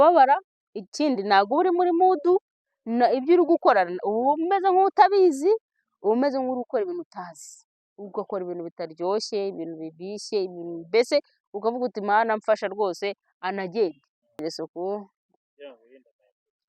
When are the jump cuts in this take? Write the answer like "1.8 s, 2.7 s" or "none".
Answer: 14.4 s